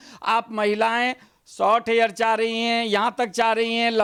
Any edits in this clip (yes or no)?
no